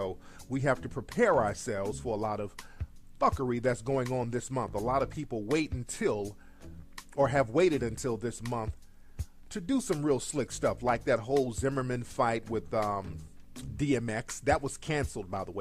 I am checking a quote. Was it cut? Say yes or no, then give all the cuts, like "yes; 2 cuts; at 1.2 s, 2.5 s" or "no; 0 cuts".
yes; 1 cut; at 6.3 s